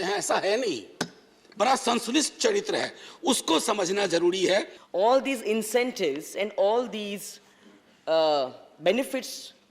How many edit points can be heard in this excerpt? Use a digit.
1